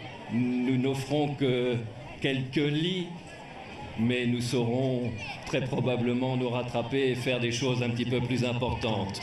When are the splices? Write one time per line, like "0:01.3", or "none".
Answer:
0:06.4